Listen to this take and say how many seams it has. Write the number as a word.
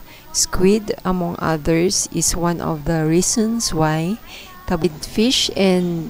one